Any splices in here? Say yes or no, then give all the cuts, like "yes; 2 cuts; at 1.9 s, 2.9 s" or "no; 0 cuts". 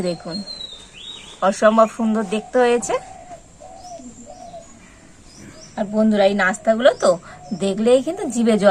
yes; 2 cuts; at 3.4 s, 5.3 s